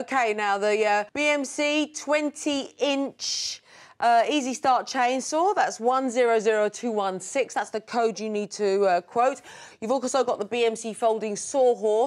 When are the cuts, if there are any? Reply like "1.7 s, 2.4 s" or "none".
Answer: 1.1 s